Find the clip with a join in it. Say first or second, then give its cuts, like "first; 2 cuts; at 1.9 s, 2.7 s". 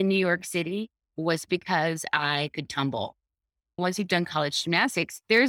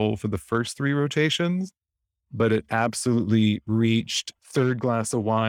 first; 1 cut; at 3.7 s